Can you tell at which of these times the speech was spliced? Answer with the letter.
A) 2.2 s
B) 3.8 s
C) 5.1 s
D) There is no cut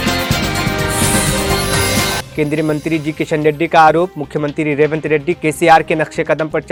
D